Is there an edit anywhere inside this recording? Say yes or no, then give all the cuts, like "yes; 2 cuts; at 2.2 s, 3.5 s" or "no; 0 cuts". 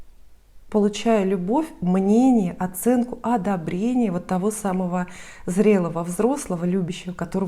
no; 0 cuts